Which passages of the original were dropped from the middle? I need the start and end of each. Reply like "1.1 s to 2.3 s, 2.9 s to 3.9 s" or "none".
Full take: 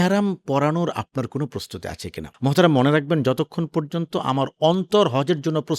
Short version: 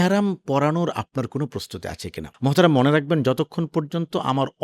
none